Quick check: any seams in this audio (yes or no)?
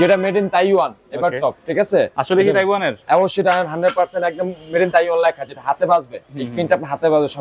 no